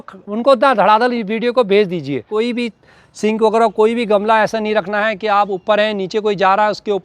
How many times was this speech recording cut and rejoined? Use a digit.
1